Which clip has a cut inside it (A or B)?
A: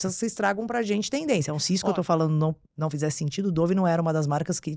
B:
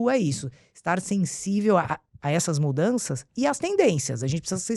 A